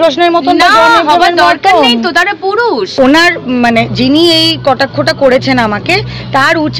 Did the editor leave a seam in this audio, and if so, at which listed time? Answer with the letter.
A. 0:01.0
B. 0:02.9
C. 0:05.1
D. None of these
B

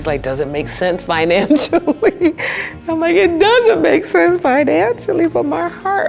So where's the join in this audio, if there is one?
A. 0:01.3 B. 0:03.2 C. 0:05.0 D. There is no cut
D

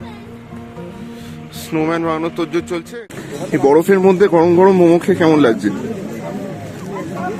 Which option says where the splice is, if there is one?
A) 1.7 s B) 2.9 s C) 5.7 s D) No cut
B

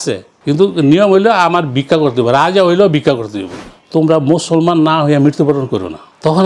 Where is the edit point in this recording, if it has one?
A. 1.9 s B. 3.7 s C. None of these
B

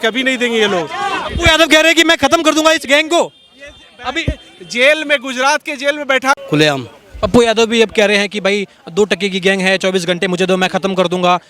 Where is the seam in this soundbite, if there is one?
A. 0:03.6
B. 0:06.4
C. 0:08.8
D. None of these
B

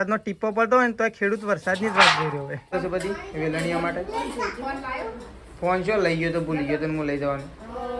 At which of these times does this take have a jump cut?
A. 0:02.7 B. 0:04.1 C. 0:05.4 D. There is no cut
A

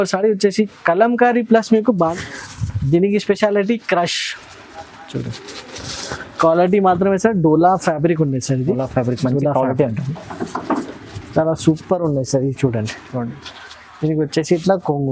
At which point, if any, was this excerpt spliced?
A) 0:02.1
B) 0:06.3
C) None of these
A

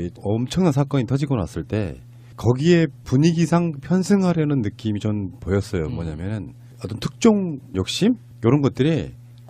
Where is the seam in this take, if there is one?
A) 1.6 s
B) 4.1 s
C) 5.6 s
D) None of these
A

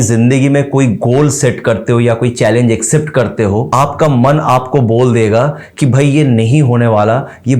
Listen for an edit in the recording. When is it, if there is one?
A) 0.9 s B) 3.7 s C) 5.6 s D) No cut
B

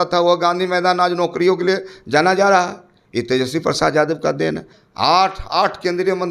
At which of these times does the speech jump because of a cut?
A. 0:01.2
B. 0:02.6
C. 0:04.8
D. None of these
C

